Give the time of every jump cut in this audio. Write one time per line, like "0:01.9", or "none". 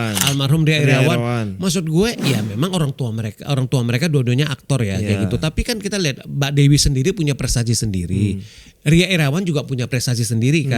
none